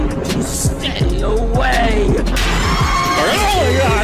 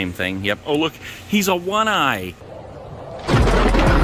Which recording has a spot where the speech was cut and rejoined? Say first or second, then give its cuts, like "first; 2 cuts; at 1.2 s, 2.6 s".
second; 1 cut; at 2.6 s